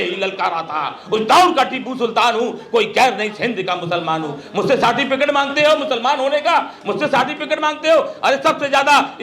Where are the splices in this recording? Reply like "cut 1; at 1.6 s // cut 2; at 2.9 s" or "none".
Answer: none